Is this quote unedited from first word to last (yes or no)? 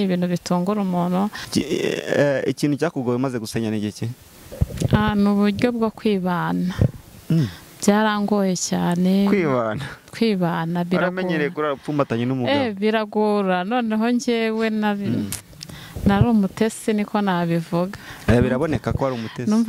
no